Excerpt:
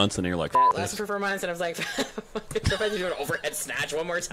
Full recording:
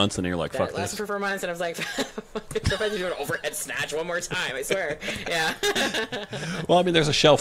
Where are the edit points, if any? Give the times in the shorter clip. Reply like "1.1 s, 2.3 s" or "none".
none